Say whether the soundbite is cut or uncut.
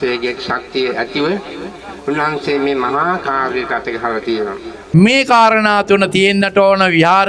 cut